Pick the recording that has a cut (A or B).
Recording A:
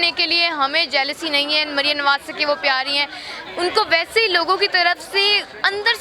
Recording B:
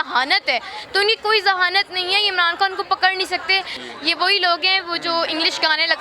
B